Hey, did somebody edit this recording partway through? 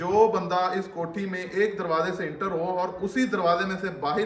no; 0 cuts

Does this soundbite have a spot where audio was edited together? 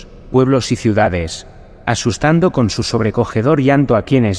no; 0 cuts

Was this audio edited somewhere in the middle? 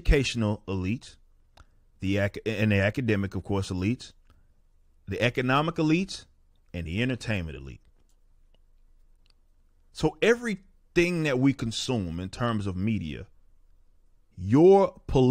no; 0 cuts

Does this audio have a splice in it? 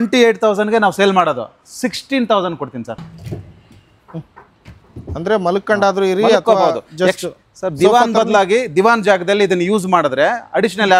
yes; 1 cut; at 3.0 s

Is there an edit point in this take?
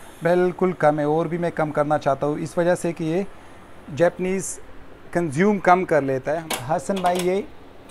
yes; 1 cut; at 6.4 s

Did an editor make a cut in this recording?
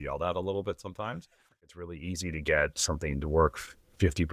yes; 1 cut; at 1.7 s

